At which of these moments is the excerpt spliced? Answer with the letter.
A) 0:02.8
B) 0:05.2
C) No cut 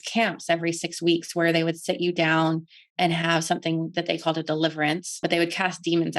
B